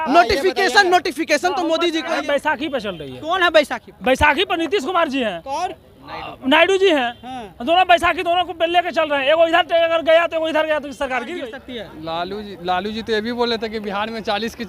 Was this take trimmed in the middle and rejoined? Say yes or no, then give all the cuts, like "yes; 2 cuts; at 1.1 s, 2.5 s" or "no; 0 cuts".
yes; 2 cuts; at 2.1 s, 11.4 s